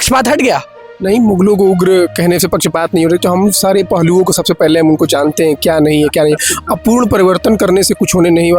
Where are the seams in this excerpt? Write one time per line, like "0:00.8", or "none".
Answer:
none